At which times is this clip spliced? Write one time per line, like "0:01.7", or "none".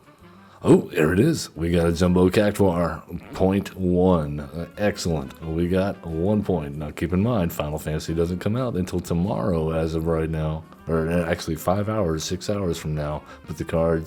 none